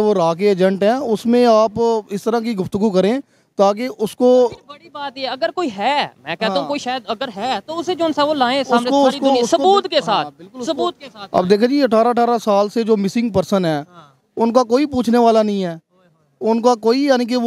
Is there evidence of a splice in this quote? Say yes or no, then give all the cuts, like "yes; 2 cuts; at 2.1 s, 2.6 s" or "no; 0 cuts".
no; 0 cuts